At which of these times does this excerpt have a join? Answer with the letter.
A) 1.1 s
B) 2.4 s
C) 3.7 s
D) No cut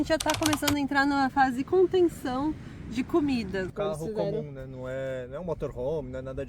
C